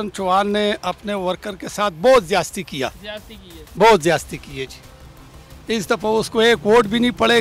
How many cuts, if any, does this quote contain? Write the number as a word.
zero